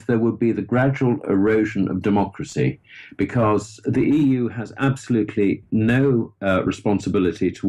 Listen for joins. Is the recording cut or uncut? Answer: uncut